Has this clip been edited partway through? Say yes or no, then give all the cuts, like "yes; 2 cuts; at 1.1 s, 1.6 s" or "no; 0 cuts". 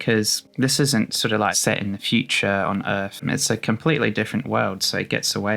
yes; 2 cuts; at 1.6 s, 3.2 s